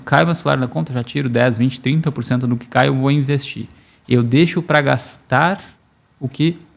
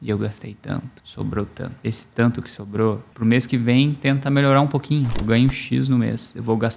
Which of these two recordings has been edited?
second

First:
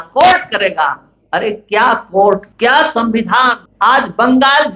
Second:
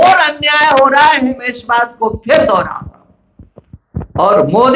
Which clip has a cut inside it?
first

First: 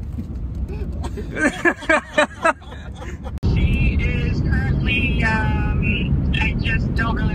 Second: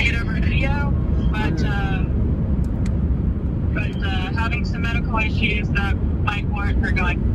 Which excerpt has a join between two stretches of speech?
first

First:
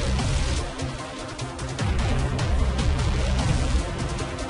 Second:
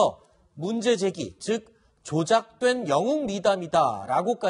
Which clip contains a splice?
second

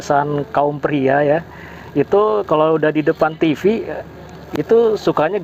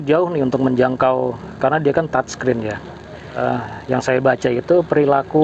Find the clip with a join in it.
second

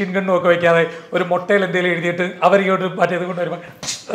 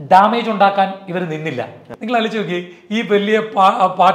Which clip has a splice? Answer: second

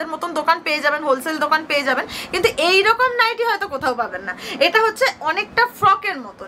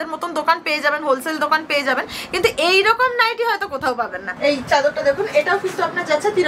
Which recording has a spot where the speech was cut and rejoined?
second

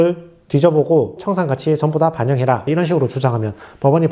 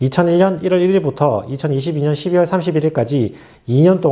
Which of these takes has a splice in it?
first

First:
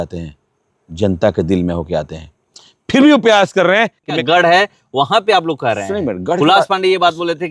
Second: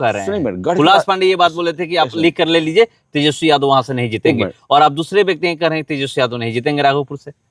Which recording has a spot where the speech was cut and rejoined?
first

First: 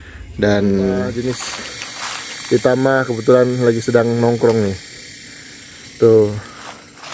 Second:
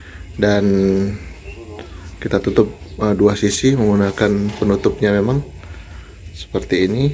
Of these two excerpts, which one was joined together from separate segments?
first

